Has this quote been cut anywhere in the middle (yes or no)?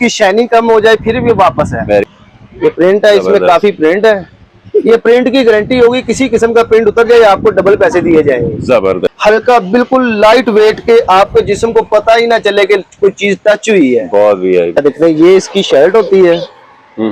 yes